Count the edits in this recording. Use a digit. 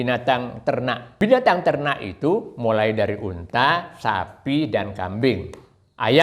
1